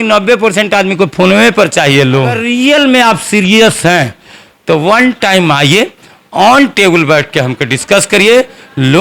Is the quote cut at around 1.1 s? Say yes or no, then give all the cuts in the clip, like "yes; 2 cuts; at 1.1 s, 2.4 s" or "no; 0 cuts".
no; 1 cut; at 2.4 s